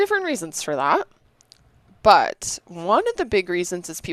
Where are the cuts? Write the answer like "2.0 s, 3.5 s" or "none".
none